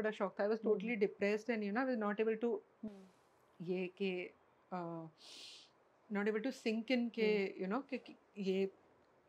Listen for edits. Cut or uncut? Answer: uncut